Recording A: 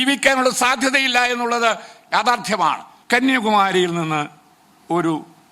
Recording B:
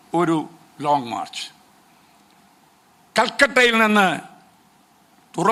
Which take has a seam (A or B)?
A